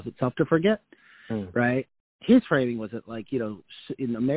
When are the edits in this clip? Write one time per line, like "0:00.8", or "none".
0:01.9